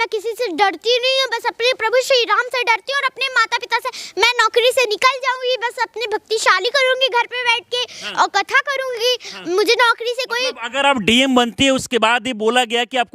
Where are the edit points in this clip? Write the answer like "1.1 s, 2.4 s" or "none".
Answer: none